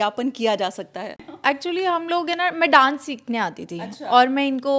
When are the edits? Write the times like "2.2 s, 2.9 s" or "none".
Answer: 1.3 s